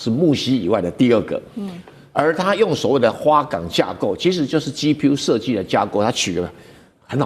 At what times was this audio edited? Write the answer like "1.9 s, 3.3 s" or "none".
none